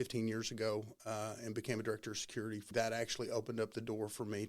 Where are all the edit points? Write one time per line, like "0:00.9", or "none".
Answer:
0:02.7